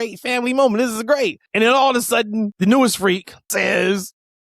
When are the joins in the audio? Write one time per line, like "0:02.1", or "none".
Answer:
0:01.4
0:02.5
0:03.5

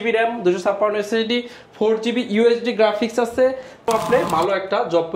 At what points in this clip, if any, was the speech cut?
0:03.9

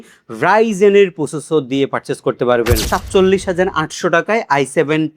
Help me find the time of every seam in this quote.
0:02.8

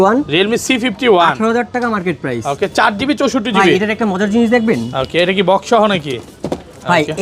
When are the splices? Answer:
none

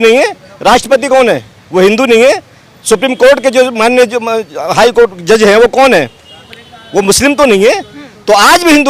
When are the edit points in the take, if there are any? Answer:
none

